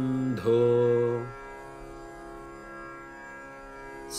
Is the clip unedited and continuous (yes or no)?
yes